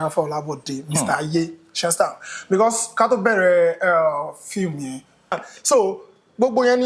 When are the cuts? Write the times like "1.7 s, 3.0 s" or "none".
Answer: 5.4 s